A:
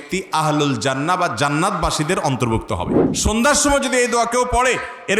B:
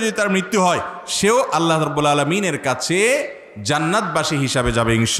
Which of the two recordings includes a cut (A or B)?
A